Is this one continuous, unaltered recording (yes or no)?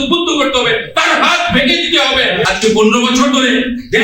no